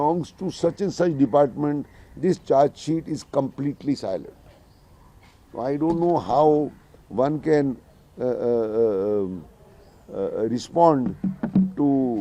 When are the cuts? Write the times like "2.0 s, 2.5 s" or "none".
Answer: none